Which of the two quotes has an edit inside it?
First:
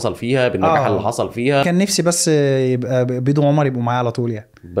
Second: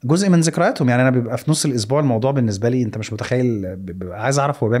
first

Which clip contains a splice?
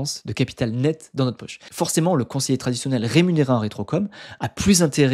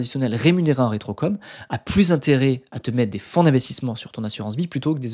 first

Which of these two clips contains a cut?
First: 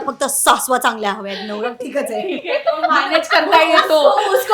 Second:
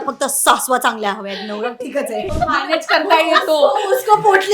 second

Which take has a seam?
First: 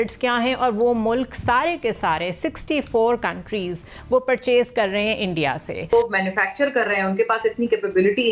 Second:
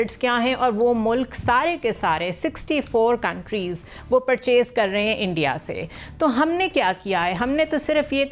first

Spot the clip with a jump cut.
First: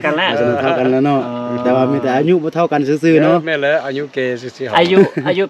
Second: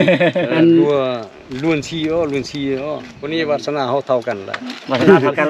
second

